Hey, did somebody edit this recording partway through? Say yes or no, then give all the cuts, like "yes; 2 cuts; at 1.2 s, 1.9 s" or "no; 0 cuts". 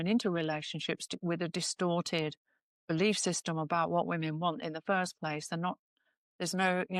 no; 0 cuts